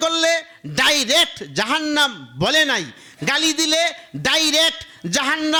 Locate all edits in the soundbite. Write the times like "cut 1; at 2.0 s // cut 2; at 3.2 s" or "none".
none